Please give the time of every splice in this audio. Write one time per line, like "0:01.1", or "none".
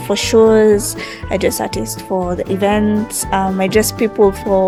none